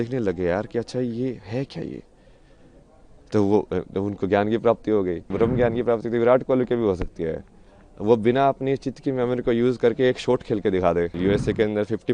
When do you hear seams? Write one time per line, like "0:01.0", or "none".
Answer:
0:05.3
0:11.1